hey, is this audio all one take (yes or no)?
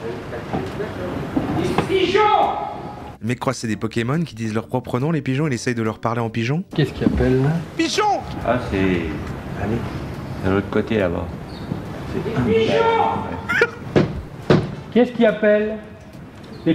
yes